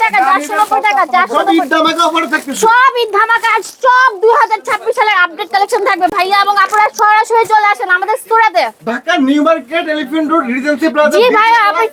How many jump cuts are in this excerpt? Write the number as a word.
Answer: zero